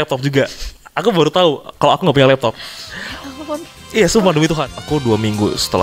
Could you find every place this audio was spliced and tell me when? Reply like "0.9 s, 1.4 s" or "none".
4.8 s